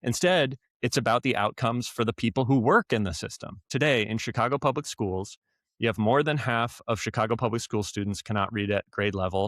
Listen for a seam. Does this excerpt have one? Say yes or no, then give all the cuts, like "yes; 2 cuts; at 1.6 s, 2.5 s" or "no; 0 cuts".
yes; 1 cut; at 3.7 s